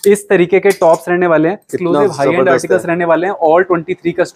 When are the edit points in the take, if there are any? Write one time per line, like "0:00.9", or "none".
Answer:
0:01.7